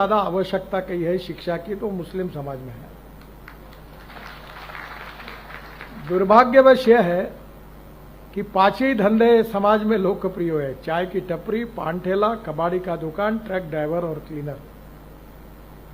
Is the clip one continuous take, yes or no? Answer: yes